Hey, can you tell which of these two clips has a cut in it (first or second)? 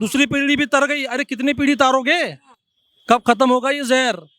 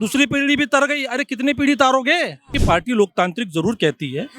second